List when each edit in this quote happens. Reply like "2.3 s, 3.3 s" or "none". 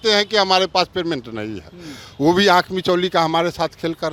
none